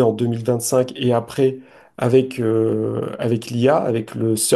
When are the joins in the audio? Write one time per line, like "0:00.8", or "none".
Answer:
none